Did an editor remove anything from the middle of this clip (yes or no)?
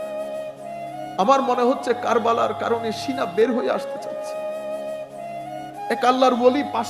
yes